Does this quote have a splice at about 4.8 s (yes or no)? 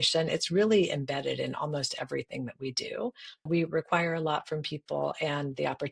no